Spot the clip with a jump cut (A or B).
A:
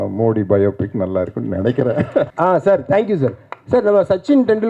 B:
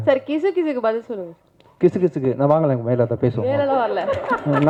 A